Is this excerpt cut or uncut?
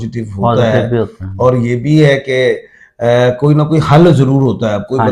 uncut